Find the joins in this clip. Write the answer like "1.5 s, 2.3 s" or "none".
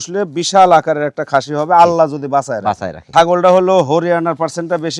3.1 s